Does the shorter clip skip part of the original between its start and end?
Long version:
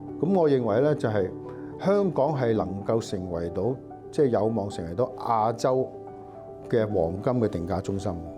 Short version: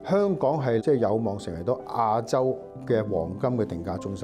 yes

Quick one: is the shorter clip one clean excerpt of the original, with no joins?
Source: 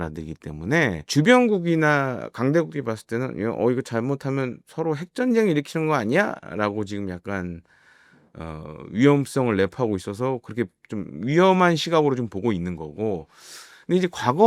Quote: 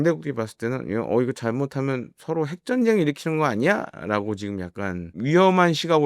no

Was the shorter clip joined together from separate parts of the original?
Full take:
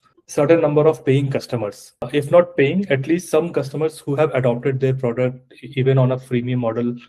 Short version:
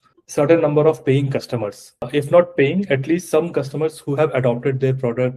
no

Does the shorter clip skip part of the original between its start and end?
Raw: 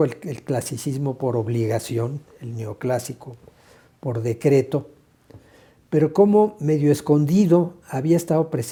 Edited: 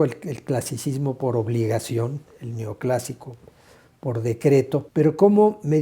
yes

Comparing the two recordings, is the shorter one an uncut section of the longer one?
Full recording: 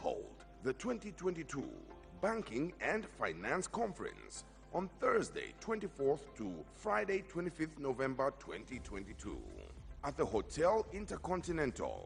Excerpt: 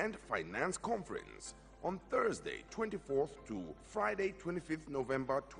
yes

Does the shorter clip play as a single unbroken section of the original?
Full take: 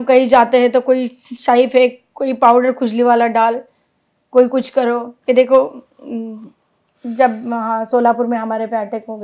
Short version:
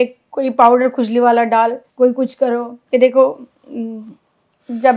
no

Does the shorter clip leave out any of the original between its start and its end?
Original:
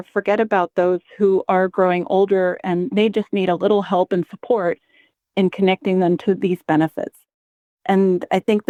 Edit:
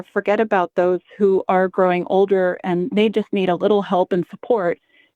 no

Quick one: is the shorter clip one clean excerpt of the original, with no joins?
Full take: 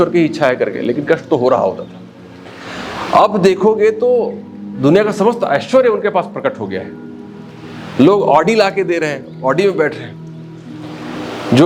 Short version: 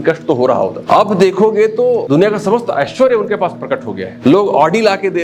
no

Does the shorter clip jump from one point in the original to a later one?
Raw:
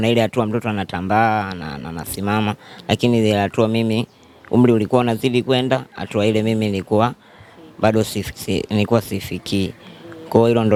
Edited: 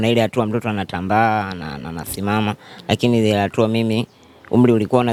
no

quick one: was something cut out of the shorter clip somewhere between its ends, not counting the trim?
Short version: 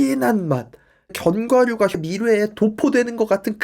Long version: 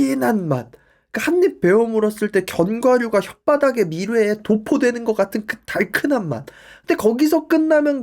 yes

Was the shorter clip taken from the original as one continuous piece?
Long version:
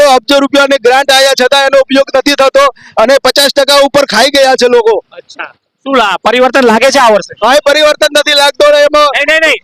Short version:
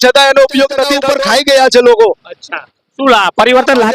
no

